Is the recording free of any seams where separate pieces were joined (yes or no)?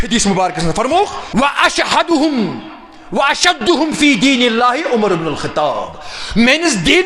no